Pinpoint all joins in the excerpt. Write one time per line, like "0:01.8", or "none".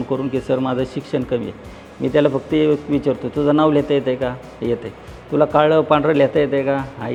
none